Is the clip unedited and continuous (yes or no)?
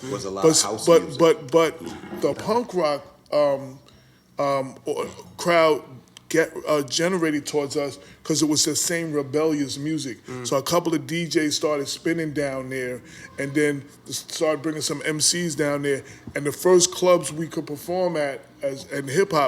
no